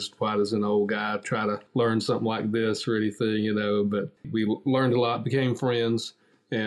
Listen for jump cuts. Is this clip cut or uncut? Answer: cut